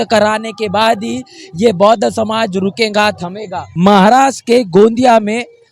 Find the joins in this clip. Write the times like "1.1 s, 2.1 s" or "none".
3.6 s